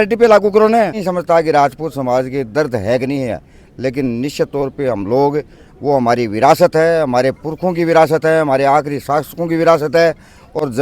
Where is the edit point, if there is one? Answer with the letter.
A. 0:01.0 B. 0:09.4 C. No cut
A